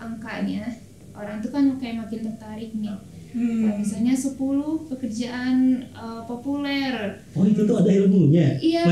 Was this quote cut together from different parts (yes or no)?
no